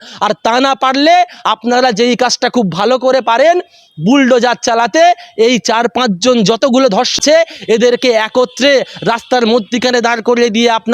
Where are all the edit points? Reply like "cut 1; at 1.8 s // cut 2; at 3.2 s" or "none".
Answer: cut 1; at 7.2 s

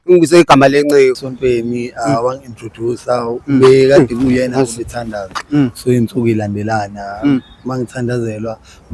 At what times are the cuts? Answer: cut 1; at 1.2 s

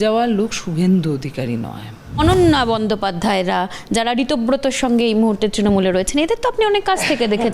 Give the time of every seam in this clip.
cut 1; at 2.2 s

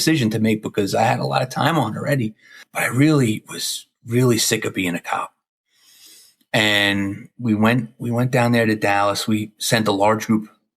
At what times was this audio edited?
cut 1; at 2.7 s

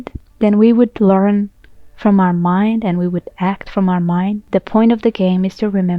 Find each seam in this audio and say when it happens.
cut 1; at 4.4 s

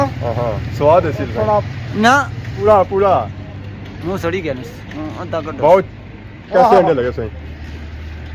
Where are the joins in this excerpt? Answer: cut 1; at 2.6 s

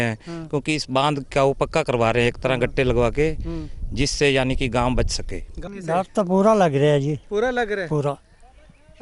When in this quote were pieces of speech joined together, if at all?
cut 1; at 5.7 s

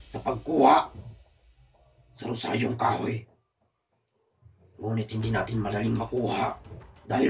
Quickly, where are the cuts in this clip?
none

